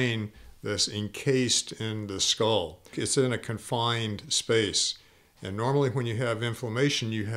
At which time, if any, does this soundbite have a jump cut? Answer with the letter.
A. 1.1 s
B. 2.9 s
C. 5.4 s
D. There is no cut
B